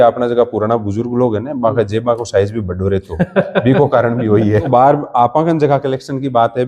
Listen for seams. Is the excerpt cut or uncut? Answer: cut